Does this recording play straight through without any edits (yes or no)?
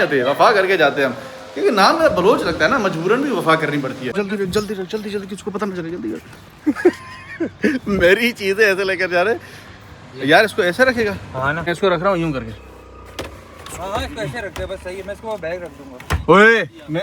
yes